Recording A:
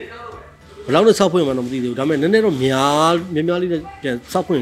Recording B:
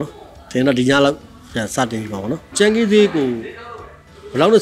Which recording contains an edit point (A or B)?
B